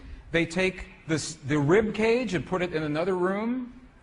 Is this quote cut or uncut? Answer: cut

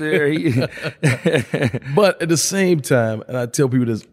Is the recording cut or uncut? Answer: uncut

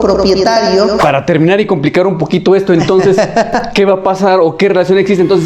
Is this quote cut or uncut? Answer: cut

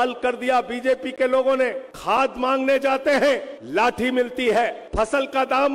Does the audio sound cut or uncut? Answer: cut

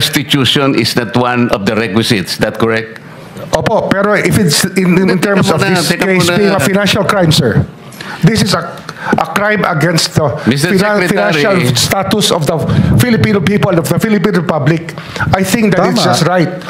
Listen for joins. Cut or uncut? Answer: uncut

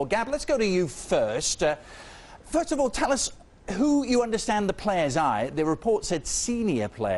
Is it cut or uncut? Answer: cut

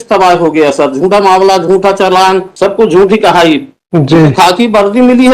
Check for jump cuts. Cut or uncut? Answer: cut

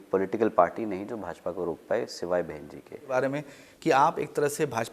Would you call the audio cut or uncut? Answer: cut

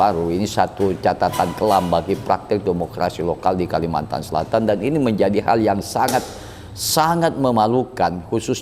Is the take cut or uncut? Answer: uncut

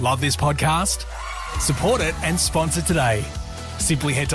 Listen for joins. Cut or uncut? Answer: uncut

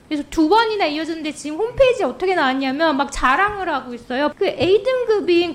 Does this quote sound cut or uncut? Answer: cut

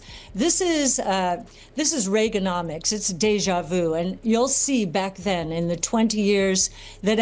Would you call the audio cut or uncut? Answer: uncut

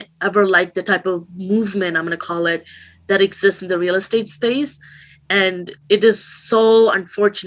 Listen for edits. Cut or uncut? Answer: uncut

